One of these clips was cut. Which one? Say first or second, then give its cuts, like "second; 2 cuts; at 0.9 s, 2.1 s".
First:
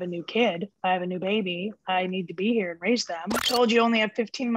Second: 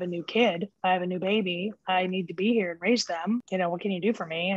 first; 1 cut; at 3.3 s